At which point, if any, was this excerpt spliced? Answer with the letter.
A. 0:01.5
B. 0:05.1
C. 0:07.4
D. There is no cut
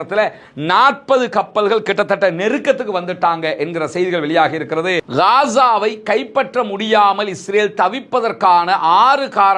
B